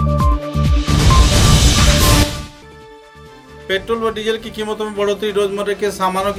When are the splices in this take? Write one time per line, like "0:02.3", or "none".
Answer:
none